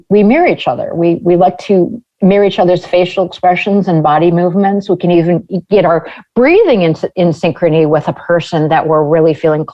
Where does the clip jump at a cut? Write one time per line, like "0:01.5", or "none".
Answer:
none